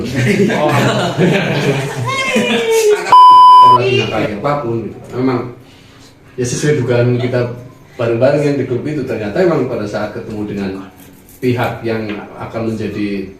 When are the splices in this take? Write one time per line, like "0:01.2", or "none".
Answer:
0:04.1